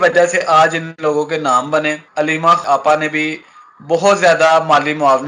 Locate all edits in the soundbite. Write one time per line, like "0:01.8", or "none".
0:02.6